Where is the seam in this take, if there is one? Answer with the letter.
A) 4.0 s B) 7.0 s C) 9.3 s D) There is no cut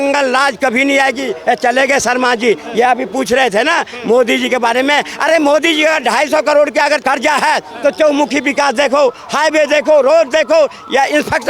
B